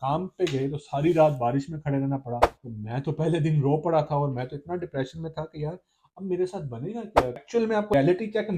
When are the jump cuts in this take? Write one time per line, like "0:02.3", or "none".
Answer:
0:02.5
0:07.4